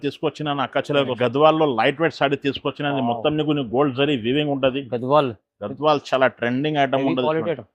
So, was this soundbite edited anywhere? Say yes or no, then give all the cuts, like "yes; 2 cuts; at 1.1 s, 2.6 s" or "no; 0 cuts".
yes; 1 cut; at 1.2 s